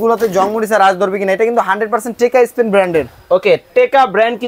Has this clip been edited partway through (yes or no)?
no